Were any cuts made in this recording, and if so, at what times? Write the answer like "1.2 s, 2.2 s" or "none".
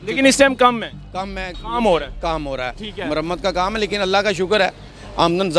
none